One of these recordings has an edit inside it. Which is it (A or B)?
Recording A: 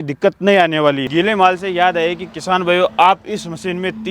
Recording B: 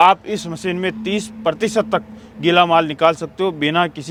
A